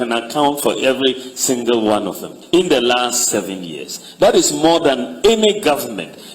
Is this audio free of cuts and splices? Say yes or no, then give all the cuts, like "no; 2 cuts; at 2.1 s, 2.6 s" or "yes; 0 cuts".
no; 1 cut; at 2.3 s